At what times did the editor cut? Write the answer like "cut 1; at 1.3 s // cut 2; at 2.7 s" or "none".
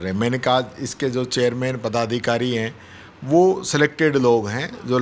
none